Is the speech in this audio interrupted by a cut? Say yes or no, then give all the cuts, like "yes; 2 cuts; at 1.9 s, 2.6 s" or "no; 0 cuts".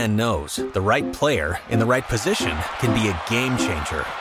no; 0 cuts